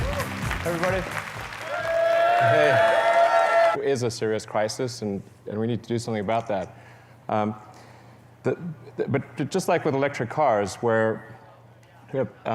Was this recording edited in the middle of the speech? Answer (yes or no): no